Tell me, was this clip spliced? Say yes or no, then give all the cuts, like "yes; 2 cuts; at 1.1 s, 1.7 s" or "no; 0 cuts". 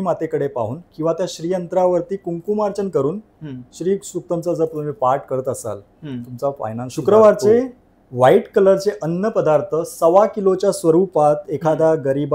yes; 1 cut; at 6.9 s